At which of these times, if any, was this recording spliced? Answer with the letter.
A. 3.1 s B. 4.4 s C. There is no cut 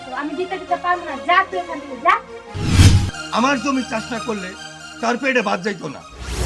A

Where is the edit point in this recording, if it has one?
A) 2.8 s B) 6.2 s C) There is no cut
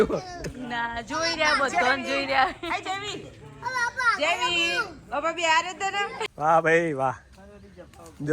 B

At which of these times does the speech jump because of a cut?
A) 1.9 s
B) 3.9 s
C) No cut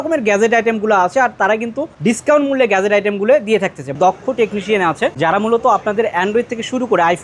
B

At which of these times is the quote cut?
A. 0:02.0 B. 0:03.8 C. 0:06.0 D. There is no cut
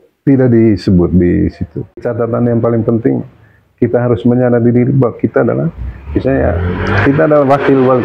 A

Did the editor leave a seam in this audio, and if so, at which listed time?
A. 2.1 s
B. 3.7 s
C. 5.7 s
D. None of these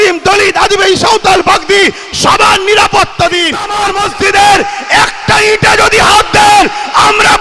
B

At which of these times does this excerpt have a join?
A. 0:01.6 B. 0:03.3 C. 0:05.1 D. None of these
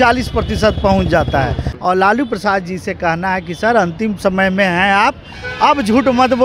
A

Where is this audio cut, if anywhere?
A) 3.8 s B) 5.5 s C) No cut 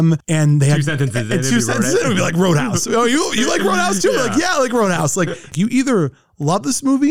B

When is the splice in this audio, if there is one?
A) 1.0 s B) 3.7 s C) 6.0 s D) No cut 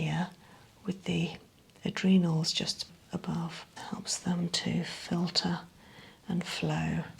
B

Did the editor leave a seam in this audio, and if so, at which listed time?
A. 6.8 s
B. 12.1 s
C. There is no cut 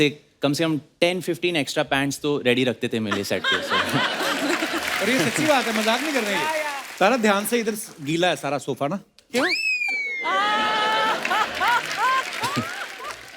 A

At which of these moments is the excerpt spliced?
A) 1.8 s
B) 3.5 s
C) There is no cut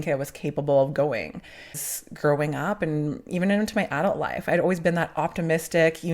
A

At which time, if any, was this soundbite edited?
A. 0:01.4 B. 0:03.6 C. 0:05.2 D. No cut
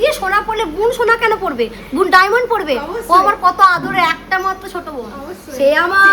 D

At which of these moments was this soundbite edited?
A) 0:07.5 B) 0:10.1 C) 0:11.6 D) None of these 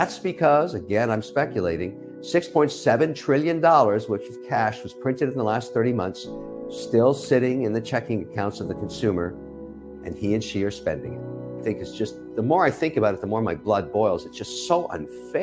C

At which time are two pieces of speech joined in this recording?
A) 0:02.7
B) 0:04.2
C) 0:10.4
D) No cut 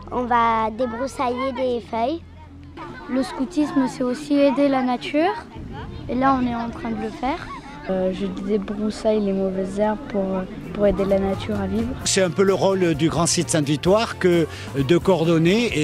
D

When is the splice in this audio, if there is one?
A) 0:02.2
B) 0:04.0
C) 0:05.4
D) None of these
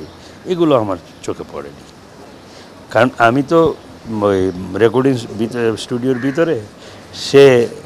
D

